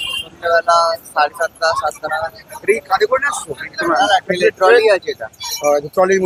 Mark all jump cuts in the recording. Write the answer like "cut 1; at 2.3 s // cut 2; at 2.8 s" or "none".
none